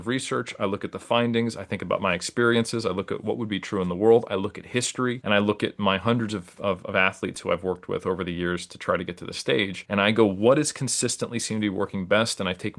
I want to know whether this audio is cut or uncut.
uncut